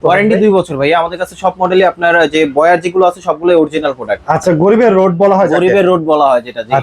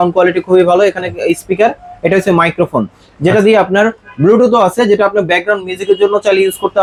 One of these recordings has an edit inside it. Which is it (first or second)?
first